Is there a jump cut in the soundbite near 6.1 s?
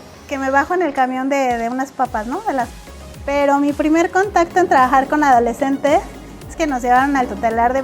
no; 1 cut; at 2.7 s

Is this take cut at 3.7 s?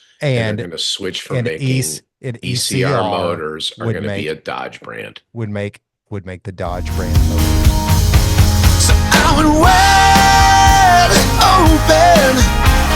no; 1 cut; at 7.2 s

